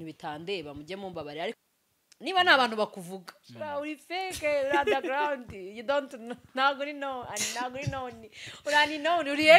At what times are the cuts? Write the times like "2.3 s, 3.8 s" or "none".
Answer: 1.6 s